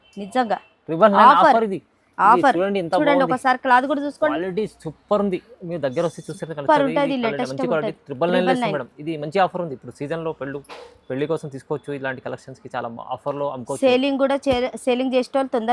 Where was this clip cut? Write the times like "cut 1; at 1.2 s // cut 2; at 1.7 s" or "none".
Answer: none